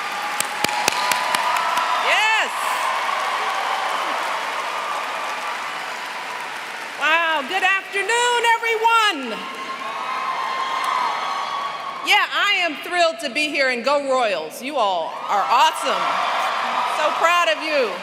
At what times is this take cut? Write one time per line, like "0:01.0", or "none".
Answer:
none